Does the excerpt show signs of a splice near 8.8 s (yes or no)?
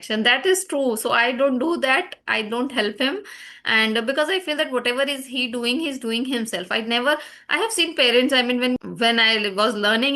yes